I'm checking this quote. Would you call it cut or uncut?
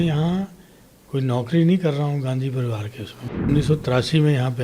cut